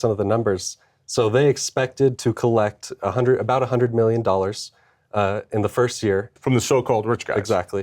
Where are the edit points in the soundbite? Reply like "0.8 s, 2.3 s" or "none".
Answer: 6.4 s